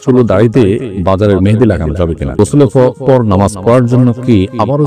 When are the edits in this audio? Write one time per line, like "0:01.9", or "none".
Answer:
0:00.9
0:02.4